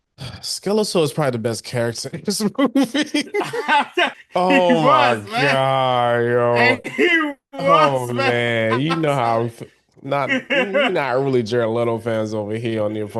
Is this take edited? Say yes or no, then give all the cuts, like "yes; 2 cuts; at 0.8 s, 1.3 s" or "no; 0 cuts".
yes; 1 cut; at 4.2 s